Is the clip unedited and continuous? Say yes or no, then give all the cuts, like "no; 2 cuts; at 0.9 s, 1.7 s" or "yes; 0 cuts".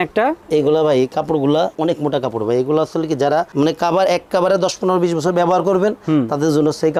yes; 0 cuts